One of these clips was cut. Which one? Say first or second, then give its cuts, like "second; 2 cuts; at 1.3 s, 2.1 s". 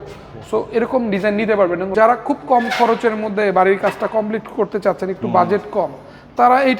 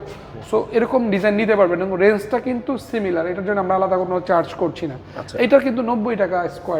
first; 1 cut; at 1.9 s